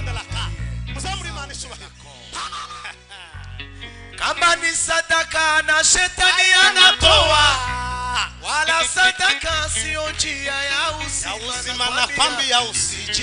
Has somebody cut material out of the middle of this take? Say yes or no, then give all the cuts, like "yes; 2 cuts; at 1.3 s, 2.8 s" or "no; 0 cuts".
yes; 1 cut; at 2.7 s